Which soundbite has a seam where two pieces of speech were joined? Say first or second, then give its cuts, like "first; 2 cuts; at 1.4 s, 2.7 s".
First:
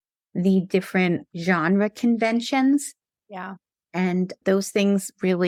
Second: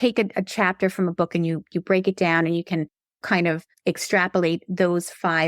second; 1 cut; at 3.3 s